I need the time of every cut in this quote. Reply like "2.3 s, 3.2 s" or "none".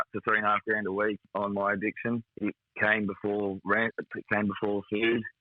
1.2 s, 2.3 s